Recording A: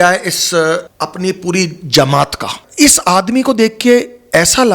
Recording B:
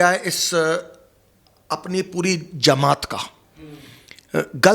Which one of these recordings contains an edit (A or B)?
A